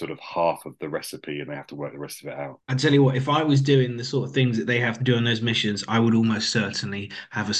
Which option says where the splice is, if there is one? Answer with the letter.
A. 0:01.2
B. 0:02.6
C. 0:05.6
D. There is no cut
B